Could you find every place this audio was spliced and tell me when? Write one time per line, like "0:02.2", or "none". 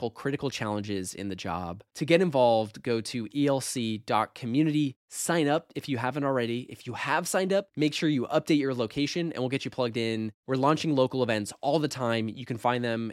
none